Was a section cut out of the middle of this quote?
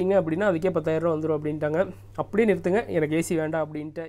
no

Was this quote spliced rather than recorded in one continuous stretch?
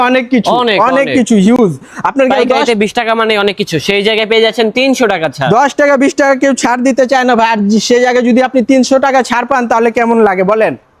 no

